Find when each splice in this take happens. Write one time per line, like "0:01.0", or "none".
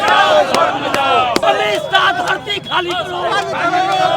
0:01.4

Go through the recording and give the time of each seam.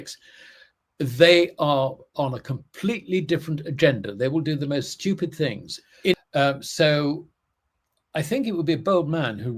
0:06.1

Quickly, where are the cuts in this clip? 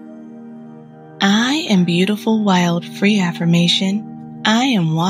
0:01.2

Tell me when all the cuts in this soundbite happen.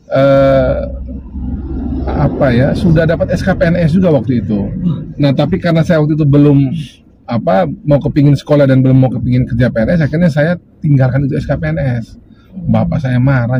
none

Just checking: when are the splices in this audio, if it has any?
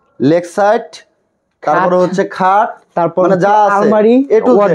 none

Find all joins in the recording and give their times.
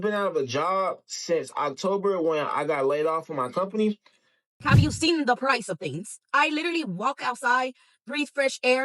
0:04.6

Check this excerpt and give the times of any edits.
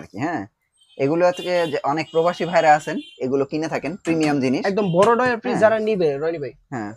none

